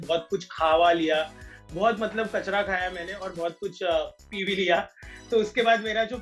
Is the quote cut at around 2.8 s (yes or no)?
no